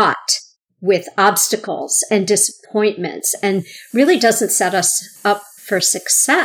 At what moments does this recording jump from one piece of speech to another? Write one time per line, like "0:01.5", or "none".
0:05.5